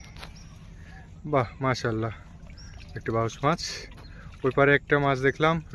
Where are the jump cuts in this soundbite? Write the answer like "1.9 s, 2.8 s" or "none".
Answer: none